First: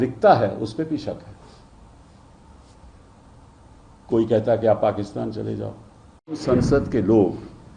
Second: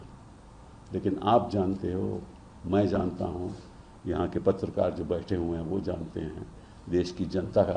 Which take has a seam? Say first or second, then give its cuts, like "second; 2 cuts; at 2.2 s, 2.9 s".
first; 1 cut; at 6.4 s